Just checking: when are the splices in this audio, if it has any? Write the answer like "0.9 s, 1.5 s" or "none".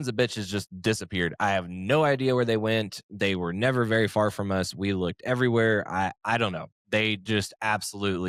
none